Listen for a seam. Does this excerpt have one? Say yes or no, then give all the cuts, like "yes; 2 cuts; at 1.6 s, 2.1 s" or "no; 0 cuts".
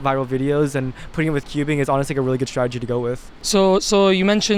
no; 0 cuts